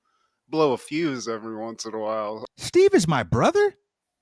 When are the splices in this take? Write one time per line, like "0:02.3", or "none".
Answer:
0:02.4